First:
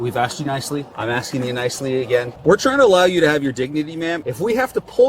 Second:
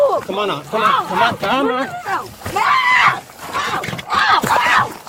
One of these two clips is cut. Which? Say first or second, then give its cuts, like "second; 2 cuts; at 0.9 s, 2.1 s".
first; 3 cuts; at 0.9 s, 2.3 s, 4.2 s